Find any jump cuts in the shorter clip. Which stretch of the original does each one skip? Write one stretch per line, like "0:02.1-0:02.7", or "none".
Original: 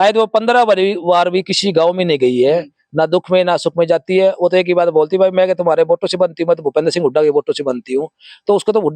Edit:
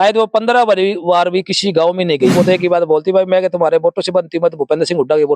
0:02.3-0:04.4